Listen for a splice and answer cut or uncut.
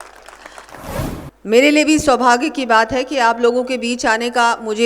cut